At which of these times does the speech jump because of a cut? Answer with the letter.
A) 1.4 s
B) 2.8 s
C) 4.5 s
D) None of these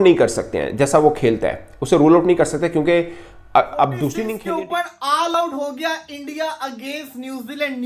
C